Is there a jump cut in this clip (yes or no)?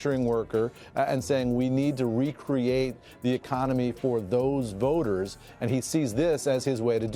no